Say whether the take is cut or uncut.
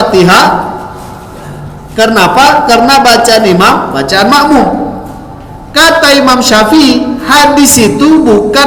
uncut